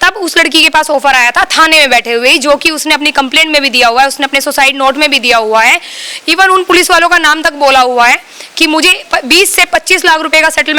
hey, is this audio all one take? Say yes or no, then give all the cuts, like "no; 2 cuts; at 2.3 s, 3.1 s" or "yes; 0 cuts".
yes; 0 cuts